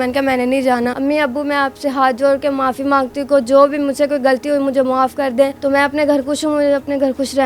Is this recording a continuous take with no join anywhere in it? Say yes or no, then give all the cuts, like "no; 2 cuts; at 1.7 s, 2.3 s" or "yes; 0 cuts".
no; 2 cuts; at 0.9 s, 5.5 s